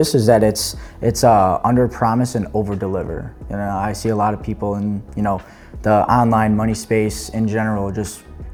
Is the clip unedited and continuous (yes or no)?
yes